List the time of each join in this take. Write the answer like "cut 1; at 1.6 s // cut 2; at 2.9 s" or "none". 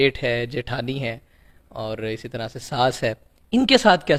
none